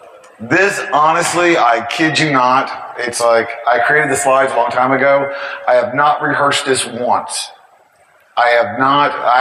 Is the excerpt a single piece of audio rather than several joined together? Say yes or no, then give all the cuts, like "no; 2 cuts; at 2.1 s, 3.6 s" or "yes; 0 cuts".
yes; 0 cuts